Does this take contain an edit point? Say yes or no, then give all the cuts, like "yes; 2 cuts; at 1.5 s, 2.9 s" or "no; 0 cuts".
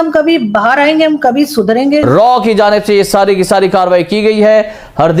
yes; 1 cut; at 2.1 s